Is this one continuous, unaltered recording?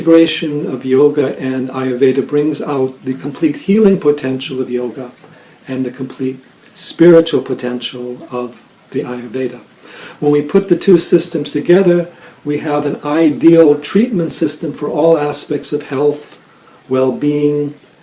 yes; 0 cuts

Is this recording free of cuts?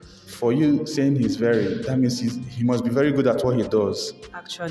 yes; 0 cuts

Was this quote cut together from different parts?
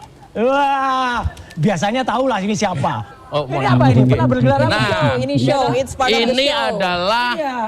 yes; 1 cut; at 3.1 s

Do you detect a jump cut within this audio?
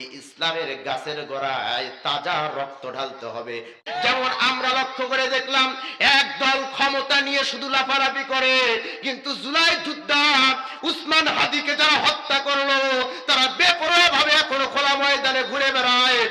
yes; 1 cut; at 3.7 s

